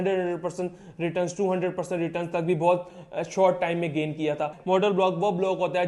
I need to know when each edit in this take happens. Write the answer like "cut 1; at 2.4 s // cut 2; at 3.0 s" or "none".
cut 1; at 4.5 s